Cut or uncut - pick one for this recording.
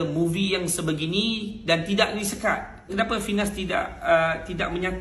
uncut